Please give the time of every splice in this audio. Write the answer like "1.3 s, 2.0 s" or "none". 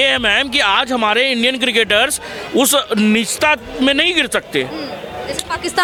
none